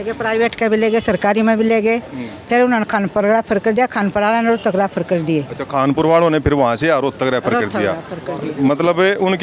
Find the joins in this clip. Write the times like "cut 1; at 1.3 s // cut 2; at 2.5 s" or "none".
none